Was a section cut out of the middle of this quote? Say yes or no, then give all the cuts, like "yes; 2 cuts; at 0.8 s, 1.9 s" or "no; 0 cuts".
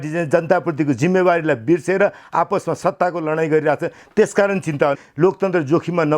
yes; 1 cut; at 5.0 s